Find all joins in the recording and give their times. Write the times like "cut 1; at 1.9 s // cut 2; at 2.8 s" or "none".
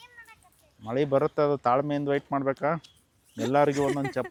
none

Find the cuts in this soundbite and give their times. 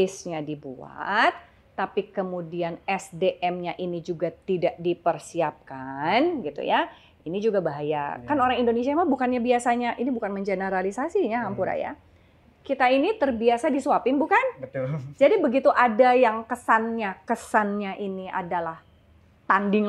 none

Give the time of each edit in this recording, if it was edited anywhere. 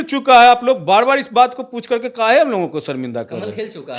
none

